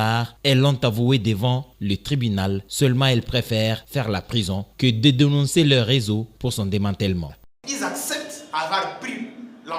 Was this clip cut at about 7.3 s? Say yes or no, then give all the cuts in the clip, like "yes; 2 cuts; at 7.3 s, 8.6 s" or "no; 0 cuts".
yes; 1 cut; at 7.3 s